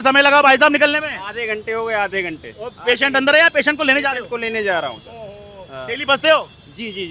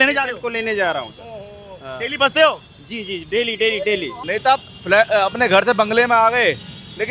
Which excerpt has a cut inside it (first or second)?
second